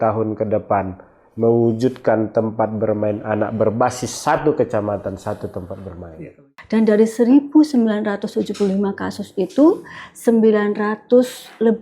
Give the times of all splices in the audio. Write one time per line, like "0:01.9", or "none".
0:06.2